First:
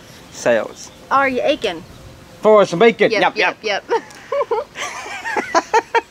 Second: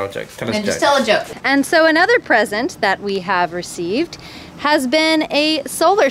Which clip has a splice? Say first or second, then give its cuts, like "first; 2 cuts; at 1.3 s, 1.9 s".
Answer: second; 1 cut; at 1.3 s